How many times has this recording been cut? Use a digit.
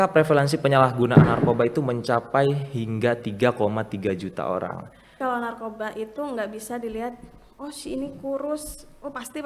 1